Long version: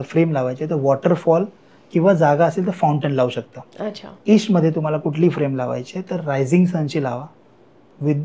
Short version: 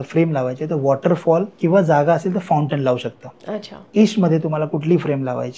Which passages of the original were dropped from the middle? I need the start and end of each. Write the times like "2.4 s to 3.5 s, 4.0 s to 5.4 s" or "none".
1.5 s to 1.8 s